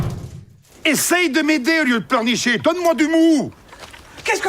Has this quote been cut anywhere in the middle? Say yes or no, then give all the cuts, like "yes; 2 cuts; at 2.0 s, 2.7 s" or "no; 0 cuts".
yes; 1 cut; at 2.6 s